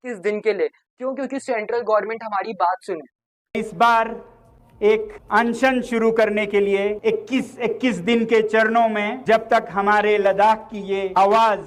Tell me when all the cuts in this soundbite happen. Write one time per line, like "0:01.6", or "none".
none